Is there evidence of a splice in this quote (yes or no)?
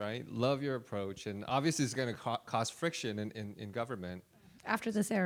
no